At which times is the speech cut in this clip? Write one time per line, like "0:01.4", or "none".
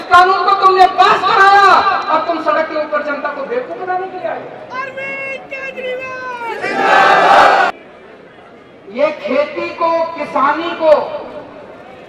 0:07.7